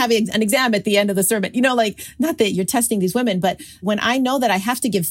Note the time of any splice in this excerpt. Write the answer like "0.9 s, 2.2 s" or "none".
3.8 s